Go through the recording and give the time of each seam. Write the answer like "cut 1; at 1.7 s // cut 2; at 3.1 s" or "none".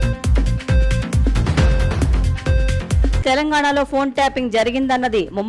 cut 1; at 1.8 s